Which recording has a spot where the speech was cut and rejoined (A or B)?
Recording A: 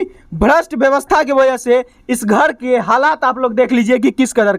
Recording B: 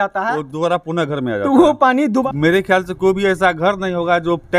B